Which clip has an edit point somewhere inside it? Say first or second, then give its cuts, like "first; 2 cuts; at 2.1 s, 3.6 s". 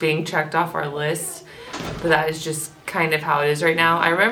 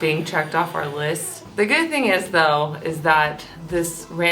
second; 1 cut; at 1.4 s